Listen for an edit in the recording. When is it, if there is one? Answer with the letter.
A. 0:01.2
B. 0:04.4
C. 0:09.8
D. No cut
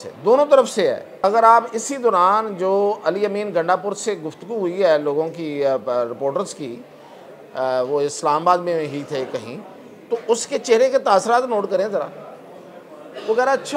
A